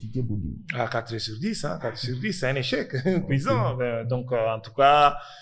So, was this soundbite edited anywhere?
no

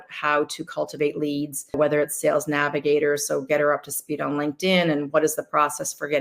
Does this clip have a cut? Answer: yes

